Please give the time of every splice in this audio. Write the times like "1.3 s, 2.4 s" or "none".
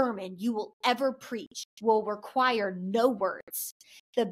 none